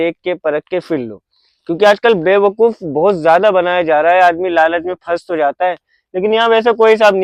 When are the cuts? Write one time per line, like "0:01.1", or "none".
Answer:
none